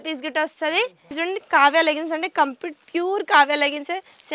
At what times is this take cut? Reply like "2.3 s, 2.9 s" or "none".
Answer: 1.1 s